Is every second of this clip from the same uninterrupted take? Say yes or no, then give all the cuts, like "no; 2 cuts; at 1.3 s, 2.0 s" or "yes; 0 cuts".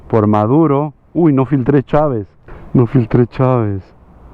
no; 1 cut; at 2.3 s